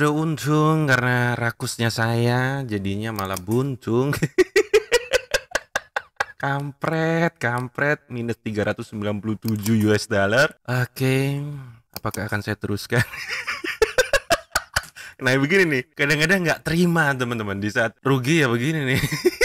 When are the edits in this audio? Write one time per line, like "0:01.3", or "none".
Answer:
none